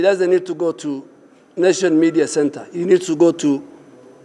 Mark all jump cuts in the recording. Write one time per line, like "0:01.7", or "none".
none